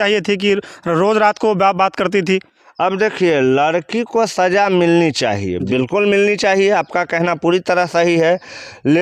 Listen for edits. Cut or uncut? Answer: uncut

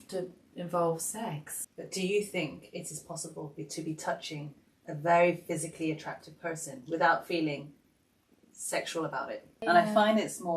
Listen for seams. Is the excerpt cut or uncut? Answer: cut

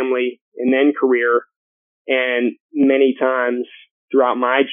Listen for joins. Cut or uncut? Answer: uncut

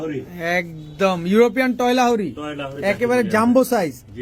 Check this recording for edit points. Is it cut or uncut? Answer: uncut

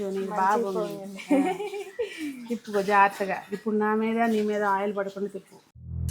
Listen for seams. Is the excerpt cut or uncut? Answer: uncut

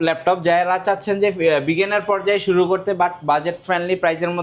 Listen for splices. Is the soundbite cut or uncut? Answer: uncut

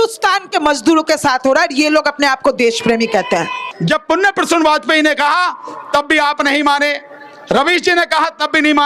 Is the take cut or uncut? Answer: cut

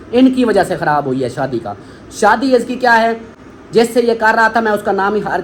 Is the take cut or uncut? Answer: uncut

